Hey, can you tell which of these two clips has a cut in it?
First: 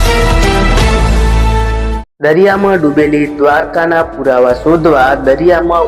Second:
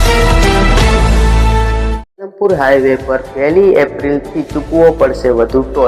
first; 1 cut; at 2.0 s

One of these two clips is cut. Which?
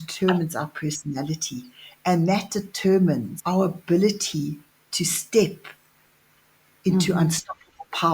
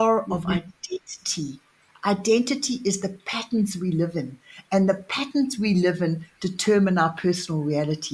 first; 1 cut; at 3.3 s

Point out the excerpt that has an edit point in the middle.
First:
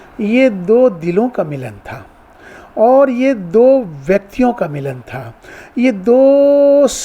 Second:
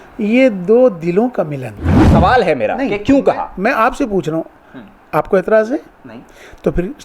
second; 1 cut; at 1.9 s

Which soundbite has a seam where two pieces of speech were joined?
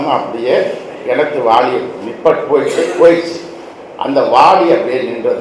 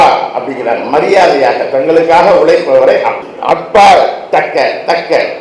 second; 1 cut; at 3.2 s

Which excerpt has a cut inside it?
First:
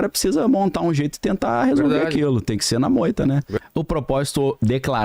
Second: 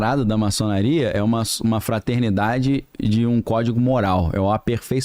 first; 1 cut; at 3.5 s

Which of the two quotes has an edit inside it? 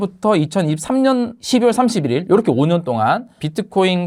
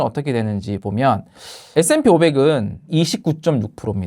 second; 2 cuts; at 1.7 s, 2.9 s

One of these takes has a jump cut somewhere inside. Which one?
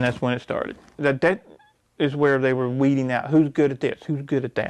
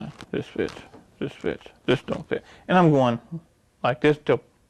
first; 1 cut; at 1.0 s

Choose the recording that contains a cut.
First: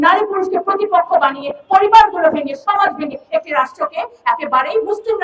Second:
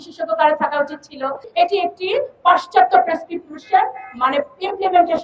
second; 1 cut; at 1.5 s

